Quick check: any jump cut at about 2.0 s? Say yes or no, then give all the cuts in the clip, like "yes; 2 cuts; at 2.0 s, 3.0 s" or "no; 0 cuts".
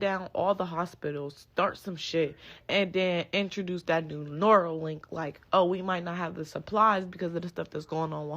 no; 0 cuts